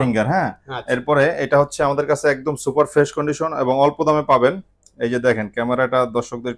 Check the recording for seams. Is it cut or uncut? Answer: uncut